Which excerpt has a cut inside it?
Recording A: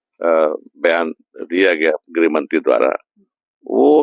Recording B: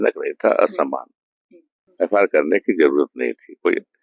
B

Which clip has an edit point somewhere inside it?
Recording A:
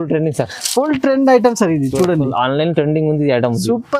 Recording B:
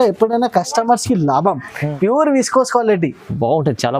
B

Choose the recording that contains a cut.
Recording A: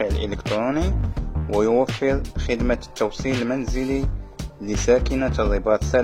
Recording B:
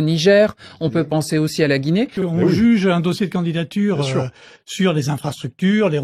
B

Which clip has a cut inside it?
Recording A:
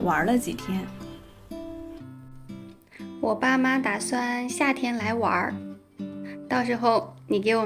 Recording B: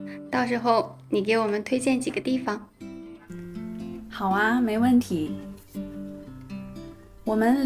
A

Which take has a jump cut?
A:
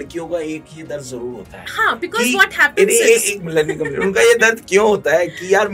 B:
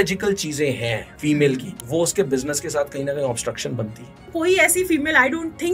B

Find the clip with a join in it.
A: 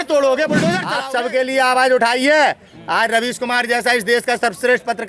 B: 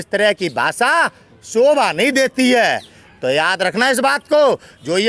A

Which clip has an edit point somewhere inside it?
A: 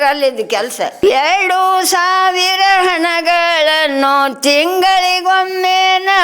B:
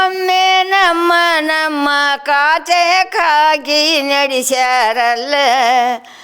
A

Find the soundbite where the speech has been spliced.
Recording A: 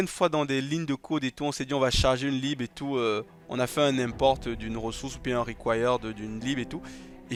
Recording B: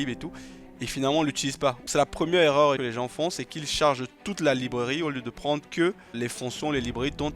B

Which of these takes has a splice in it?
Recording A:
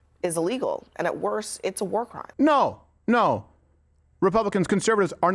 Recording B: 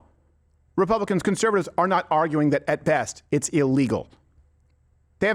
A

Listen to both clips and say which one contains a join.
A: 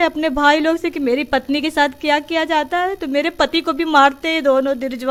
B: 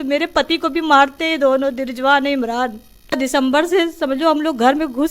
B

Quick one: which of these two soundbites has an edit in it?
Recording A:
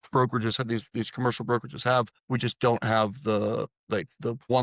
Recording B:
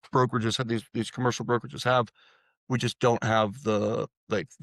A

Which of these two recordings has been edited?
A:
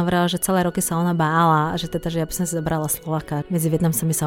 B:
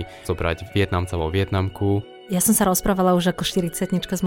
B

